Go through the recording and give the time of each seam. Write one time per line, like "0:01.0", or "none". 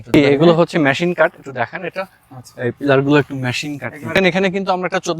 0:04.1